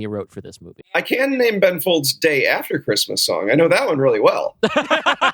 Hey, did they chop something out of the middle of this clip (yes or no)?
yes